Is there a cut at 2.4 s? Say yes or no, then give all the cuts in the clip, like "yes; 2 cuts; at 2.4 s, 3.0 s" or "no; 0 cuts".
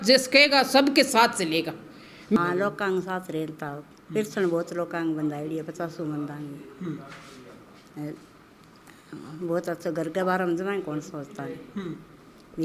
yes; 1 cut; at 2.4 s